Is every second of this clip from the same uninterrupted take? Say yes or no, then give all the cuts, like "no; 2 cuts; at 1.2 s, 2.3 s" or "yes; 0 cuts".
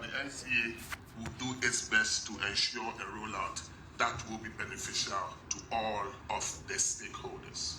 no; 3 cuts; at 1.0 s, 5.5 s, 6.2 s